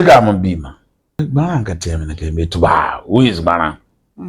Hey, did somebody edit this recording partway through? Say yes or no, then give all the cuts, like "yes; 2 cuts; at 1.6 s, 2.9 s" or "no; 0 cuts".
yes; 1 cut; at 1.2 s